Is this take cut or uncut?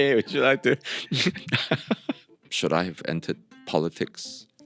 cut